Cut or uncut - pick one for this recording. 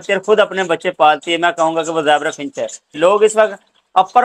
cut